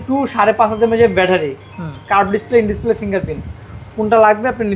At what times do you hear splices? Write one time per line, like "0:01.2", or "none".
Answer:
none